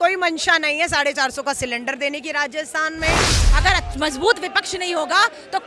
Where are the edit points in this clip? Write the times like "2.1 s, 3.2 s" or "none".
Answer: 3.4 s